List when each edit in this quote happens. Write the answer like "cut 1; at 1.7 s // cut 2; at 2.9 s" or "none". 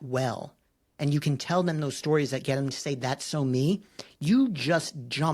none